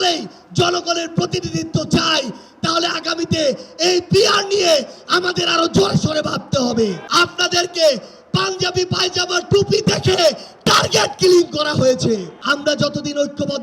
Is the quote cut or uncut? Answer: cut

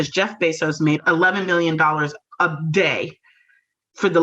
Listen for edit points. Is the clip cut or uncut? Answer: cut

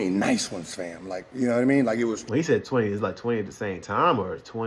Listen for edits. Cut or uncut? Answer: uncut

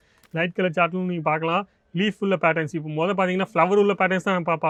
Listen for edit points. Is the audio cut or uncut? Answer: uncut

